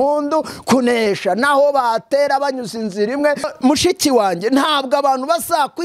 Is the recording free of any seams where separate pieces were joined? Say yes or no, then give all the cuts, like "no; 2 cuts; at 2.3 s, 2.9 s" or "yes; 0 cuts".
no; 1 cut; at 3.5 s